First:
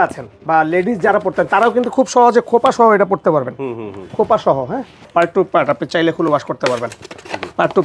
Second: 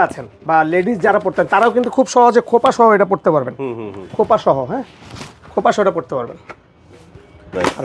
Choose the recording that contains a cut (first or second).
first